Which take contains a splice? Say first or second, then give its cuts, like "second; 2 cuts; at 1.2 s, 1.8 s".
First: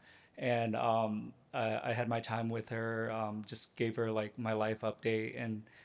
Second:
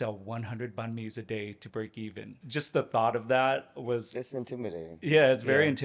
second; 1 cut; at 2.4 s